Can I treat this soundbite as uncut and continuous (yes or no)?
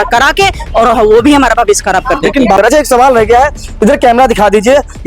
no